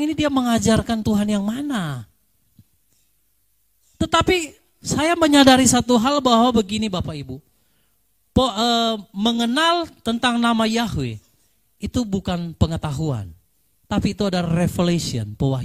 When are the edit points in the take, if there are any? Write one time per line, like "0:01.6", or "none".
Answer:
none